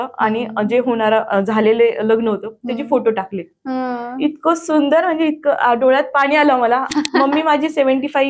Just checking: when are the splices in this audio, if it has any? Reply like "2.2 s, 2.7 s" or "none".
6.9 s